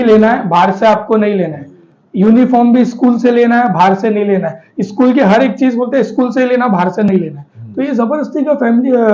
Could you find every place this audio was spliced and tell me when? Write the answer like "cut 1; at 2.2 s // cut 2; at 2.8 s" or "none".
none